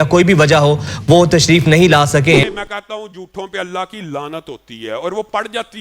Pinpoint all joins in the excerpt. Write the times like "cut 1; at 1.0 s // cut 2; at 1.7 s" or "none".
cut 1; at 2.4 s